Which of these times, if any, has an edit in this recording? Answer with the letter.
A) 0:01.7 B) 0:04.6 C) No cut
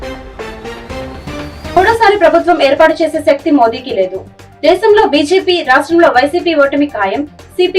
A